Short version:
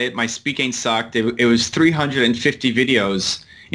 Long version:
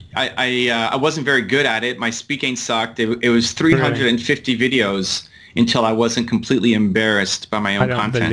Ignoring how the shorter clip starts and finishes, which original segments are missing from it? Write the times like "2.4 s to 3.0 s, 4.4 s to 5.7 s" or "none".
none

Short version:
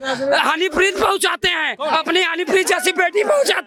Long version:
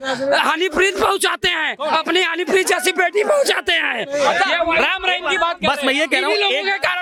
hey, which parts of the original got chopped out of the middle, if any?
none

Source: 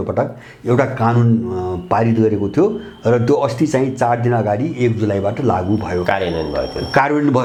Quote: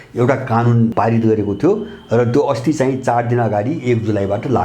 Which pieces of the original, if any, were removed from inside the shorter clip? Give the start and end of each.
1.4 s to 1.9 s

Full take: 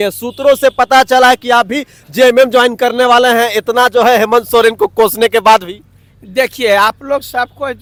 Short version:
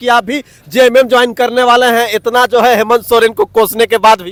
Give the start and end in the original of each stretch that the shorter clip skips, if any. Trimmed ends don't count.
none

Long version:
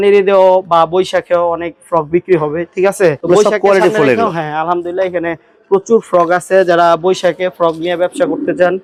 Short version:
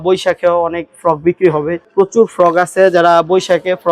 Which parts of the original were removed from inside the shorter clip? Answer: 2.7 s to 5.5 s

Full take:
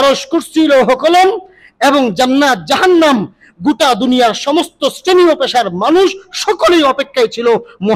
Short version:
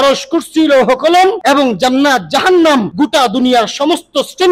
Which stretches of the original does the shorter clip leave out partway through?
1.4 s to 1.8 s, 3.3 s to 3.6 s

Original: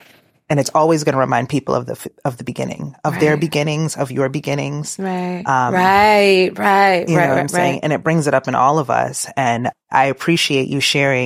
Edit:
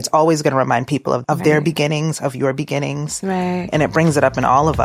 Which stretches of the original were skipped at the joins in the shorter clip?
1.8 s to 3.0 s, 5.4 s to 7.8 s

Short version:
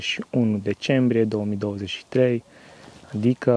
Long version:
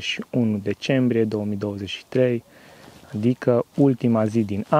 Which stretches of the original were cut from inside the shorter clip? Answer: none

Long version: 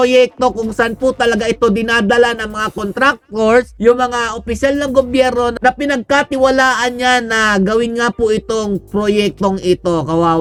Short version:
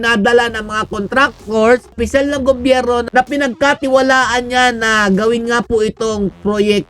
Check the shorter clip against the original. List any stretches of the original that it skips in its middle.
3.7 s to 4.4 s

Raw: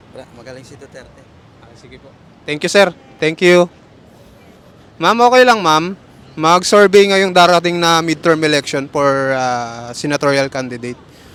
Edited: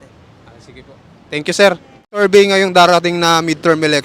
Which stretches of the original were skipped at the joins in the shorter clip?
3.4 s to 6.8 s

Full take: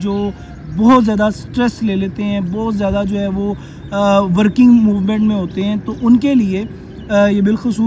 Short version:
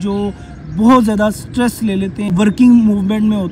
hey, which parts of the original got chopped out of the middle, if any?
2.3 s to 4.3 s

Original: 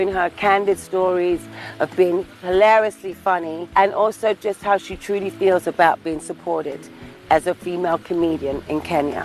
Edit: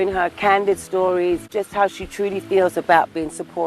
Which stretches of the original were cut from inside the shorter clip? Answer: 1.5 s to 4.4 s

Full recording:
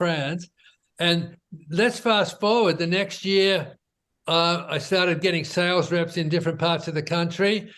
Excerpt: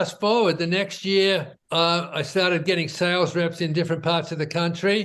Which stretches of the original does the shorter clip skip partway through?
3.8 s to 4.1 s

